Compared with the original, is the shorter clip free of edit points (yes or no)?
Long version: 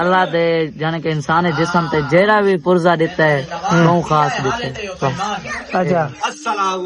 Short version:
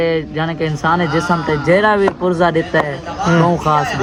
yes